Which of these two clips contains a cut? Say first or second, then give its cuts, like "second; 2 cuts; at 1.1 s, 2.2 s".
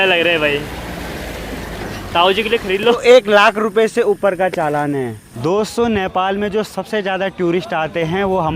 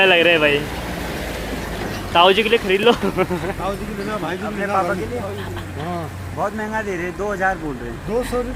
first; 2 cuts; at 3.0 s, 5.3 s